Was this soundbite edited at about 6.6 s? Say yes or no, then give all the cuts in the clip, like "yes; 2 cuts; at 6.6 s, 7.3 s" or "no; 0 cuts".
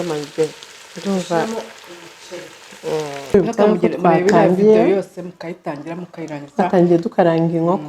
no; 1 cut; at 3.3 s